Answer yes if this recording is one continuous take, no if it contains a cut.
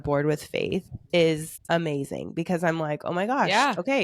no